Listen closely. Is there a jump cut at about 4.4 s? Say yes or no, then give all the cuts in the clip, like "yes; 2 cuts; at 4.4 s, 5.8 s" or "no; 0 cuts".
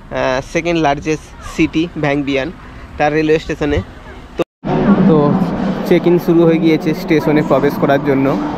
yes; 1 cut; at 4.4 s